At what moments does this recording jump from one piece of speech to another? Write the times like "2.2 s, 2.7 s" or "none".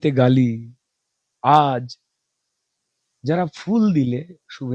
none